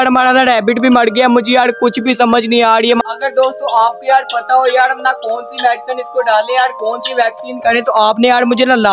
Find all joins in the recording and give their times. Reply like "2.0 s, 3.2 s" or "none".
none